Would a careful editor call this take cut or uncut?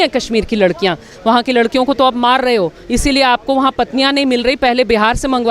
cut